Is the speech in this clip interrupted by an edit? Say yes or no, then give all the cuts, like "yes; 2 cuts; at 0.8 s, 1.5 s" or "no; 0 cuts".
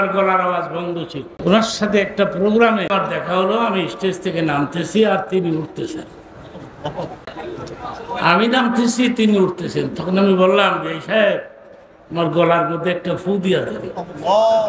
yes; 2 cuts; at 1.2 s, 2.9 s